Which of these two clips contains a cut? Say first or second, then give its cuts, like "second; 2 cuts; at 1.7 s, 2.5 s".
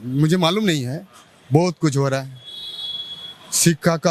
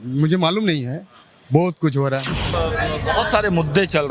second; 1 cut; at 2.4 s